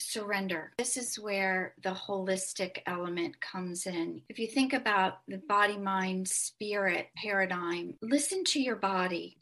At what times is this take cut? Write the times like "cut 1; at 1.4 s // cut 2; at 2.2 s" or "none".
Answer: cut 1; at 0.8 s // cut 2; at 1.7 s // cut 3; at 4.3 s